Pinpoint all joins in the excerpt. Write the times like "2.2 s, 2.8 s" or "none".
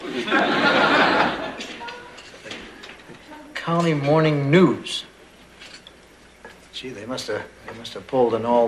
none